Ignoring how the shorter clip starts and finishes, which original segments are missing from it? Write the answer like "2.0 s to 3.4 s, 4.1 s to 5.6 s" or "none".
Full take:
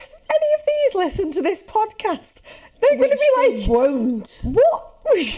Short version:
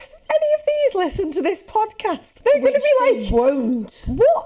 2.3 s to 2.6 s